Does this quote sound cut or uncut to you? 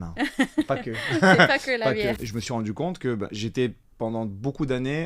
cut